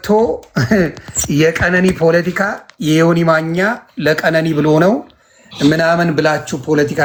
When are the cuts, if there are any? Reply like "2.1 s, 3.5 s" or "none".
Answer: none